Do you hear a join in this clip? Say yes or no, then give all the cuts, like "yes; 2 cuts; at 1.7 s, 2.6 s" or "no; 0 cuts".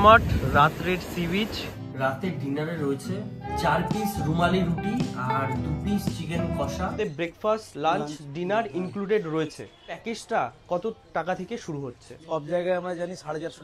yes; 5 cuts; at 1.7 s, 3.5 s, 7.0 s, 10.1 s, 12.1 s